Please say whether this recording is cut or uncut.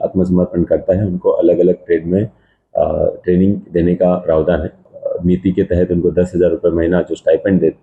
cut